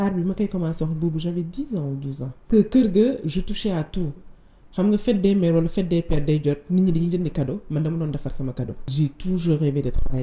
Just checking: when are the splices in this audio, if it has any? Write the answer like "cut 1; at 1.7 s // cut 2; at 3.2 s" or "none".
cut 1; at 2.4 s // cut 2; at 8.9 s